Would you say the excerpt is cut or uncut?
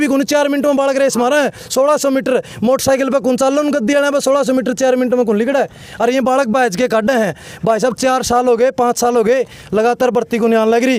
uncut